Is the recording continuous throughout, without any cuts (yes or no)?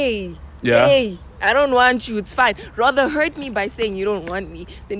yes